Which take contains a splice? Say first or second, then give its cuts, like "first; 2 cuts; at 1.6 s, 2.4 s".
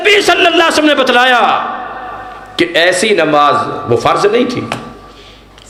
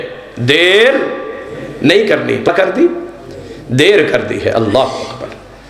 second; 1 cut; at 2.5 s